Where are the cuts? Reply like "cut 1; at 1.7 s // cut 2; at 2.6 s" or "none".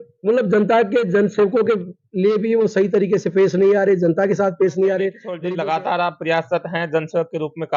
cut 1; at 5.3 s